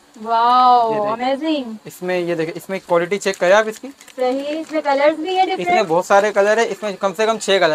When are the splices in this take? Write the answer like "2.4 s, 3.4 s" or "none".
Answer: none